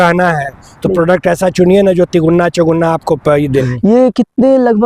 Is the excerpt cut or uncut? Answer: cut